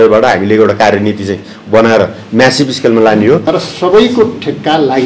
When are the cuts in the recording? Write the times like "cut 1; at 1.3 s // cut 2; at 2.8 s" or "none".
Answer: cut 1; at 3.4 s